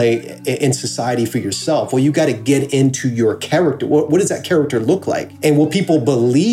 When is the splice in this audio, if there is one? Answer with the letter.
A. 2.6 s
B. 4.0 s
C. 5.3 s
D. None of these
C